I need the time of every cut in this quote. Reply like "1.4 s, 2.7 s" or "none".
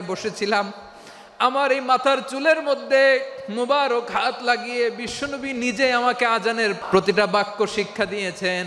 6.8 s